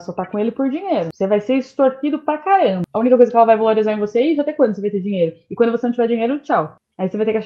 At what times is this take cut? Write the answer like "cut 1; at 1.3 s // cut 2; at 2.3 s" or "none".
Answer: cut 1; at 2.9 s